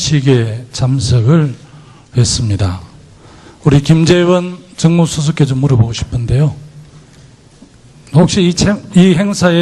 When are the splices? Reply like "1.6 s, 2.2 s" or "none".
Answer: none

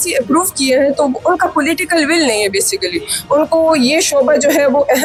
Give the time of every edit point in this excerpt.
none

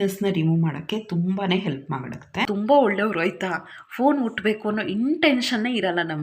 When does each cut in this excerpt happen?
2.5 s

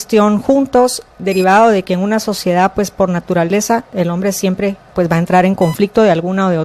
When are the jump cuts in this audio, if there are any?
1.1 s

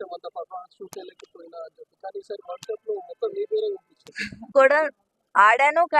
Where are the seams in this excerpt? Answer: 4.5 s

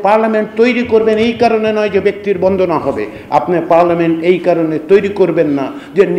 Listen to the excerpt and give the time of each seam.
none

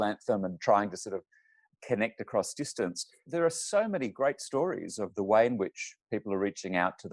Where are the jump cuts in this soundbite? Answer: 3.2 s, 5.0 s

